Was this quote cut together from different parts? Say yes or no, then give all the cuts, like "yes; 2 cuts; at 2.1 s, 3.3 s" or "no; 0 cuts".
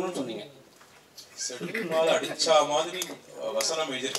no; 0 cuts